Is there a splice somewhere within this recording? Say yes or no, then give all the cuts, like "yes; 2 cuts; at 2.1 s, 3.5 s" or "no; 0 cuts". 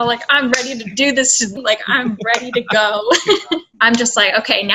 yes; 2 cuts; at 1.5 s, 3.7 s